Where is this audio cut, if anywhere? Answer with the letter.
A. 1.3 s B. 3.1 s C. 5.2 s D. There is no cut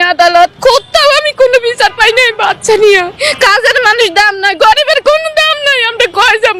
B